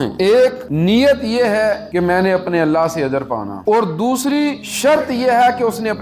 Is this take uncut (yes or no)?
yes